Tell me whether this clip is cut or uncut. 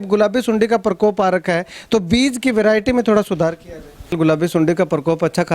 cut